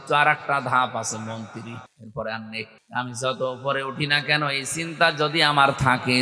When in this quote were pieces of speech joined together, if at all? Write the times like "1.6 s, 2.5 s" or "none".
2.0 s, 2.8 s